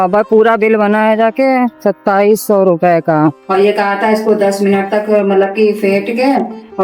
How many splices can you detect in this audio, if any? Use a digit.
1